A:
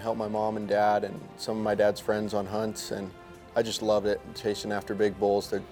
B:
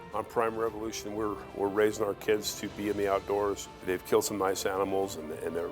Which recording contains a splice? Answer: B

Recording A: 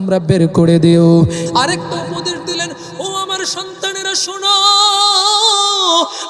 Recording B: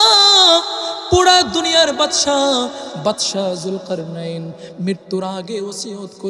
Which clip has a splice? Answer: A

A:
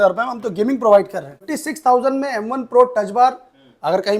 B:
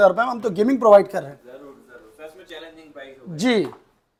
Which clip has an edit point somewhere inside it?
A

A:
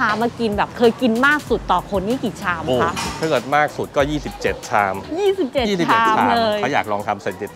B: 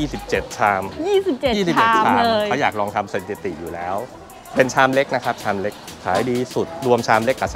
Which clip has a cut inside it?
B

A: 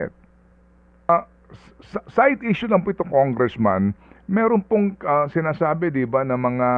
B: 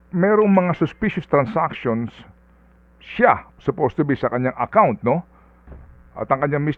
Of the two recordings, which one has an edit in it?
A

